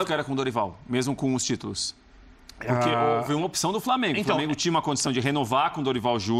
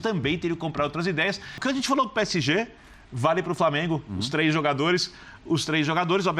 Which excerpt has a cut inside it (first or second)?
second